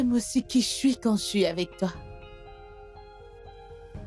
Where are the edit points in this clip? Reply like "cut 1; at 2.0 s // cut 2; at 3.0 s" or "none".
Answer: cut 1; at 1.9 s